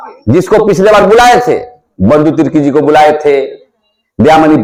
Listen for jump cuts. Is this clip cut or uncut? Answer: uncut